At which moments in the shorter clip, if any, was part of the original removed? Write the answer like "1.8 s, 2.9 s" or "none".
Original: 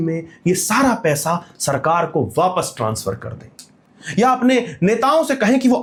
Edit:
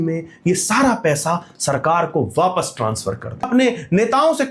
3.5 s